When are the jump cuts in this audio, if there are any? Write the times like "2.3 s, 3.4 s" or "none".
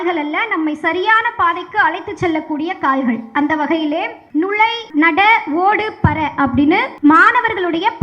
4.7 s, 6.9 s

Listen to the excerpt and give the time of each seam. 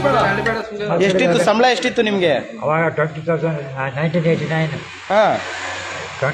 none

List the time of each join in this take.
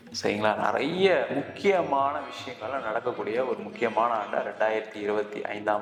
none

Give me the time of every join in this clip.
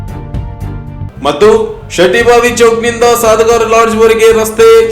1.1 s

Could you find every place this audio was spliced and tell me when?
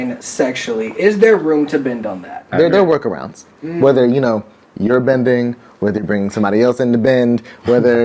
2.4 s

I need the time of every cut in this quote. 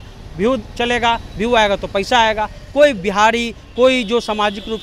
none

